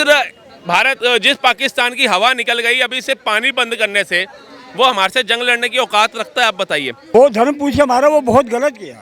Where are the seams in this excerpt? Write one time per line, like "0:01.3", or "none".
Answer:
0:07.0